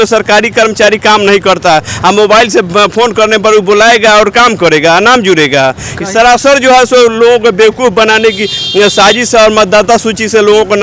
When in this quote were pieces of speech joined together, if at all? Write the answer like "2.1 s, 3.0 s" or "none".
none